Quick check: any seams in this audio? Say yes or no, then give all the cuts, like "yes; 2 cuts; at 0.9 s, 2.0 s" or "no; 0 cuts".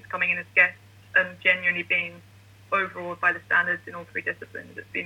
no; 0 cuts